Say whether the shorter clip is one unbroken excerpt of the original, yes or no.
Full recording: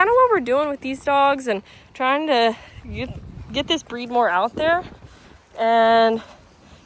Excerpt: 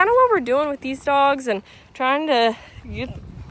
yes